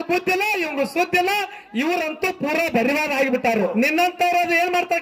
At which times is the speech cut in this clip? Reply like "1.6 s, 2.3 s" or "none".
3.7 s